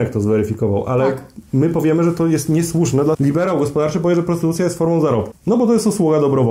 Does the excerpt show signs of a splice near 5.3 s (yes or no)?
yes